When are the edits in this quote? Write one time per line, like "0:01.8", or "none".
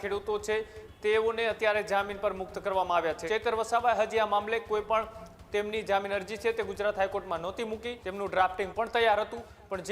0:03.2
0:08.0